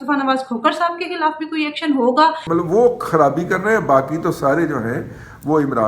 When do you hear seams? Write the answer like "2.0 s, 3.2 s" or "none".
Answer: 2.4 s